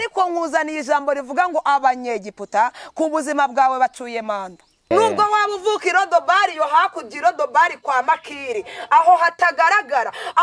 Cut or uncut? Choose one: cut